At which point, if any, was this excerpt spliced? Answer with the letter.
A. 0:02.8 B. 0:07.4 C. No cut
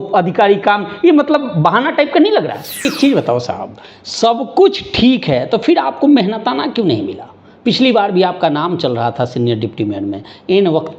A